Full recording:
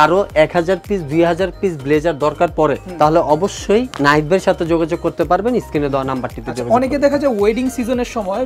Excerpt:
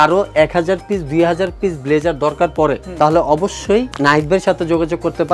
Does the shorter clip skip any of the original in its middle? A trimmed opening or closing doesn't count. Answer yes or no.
no